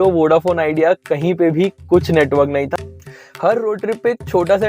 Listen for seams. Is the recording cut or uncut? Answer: cut